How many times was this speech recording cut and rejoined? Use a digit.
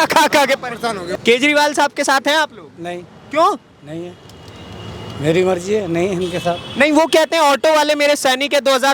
1